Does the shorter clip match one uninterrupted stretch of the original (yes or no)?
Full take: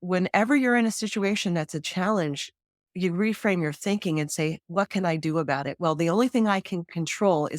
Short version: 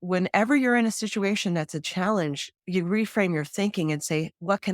no